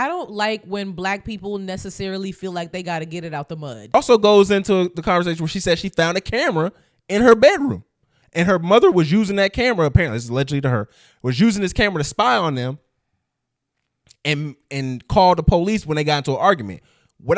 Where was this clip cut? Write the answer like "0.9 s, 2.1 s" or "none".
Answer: 3.9 s